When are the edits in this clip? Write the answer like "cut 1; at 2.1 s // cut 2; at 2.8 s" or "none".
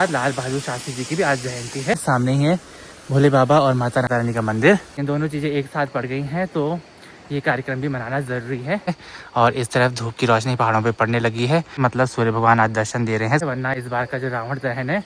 cut 1; at 2.0 s // cut 2; at 4.9 s // cut 3; at 9.1 s // cut 4; at 13.4 s